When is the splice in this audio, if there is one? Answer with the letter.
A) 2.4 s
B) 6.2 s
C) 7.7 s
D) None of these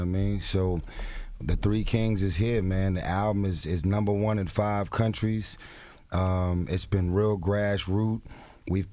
B